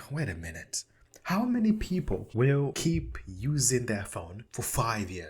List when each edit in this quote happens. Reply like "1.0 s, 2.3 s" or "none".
2.6 s, 4.4 s